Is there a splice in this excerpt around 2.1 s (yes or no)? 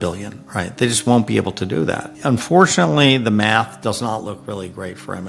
yes